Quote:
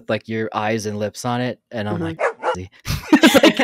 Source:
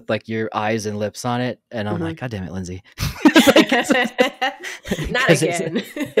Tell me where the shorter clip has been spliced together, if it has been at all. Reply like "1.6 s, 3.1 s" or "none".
2.3 s